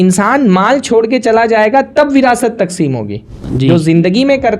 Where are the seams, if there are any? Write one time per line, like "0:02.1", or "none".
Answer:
0:03.4